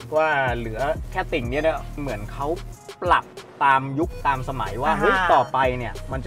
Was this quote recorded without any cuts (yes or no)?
no